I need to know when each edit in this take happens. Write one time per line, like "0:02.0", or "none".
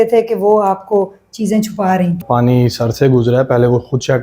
0:02.2

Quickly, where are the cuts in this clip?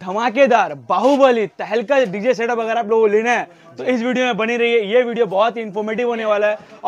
none

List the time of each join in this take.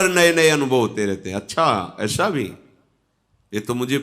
none

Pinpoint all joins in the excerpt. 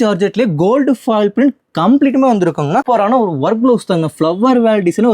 0:02.8

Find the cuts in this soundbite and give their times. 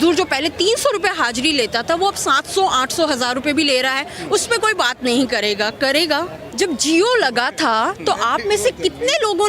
0:06.4

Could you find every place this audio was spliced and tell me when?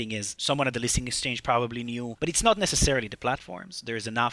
none

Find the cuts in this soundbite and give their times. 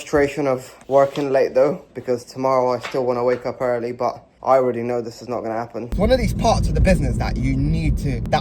0:05.9

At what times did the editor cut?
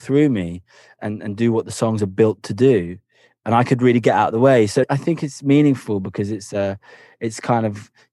0:00.9
0:04.9

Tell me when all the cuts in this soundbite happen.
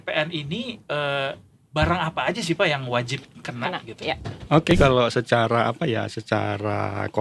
0:04.7

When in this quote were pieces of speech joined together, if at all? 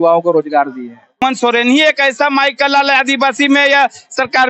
0:01.2

